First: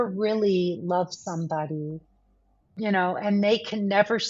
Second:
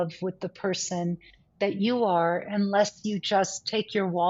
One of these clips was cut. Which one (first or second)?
first